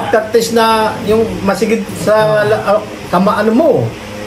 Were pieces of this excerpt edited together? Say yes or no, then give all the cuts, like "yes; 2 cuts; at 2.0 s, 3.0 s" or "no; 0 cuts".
no; 0 cuts